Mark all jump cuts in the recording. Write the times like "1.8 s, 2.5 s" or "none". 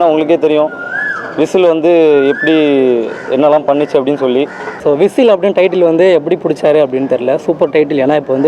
4.8 s